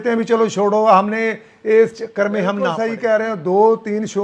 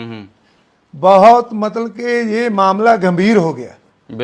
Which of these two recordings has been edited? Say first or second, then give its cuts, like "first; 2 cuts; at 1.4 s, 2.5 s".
first; 1 cut; at 2.8 s